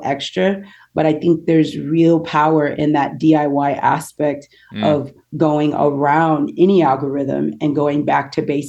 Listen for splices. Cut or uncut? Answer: uncut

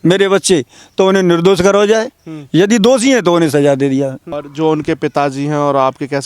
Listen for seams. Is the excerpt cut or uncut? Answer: cut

